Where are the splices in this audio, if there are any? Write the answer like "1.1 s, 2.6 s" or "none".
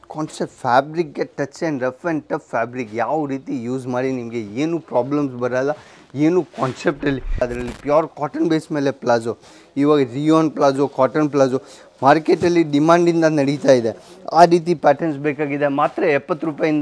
7.4 s